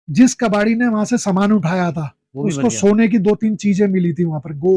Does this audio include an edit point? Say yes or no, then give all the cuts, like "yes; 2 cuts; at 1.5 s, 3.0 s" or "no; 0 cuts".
no; 0 cuts